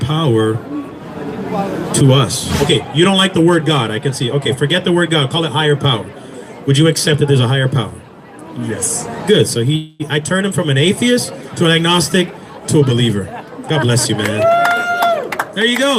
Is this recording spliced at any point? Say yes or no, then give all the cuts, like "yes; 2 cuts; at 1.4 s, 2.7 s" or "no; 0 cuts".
yes; 1 cut; at 2.6 s